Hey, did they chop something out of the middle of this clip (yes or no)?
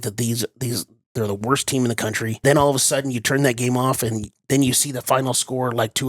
yes